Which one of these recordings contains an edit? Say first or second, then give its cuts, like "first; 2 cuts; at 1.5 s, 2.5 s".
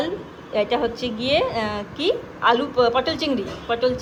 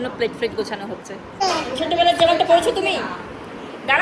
second; 1 cut; at 1.4 s